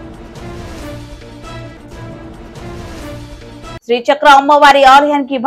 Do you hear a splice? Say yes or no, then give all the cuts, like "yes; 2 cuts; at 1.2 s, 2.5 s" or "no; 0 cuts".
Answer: no; 0 cuts